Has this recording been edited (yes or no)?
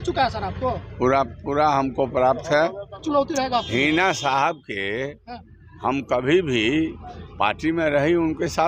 yes